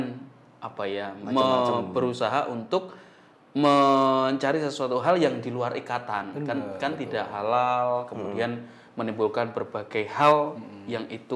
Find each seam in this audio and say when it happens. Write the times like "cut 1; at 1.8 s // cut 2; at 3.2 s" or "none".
none